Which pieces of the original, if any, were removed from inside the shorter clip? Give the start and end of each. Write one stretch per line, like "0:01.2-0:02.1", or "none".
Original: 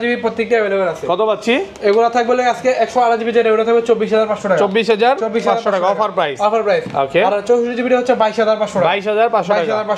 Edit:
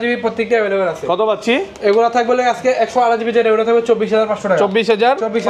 none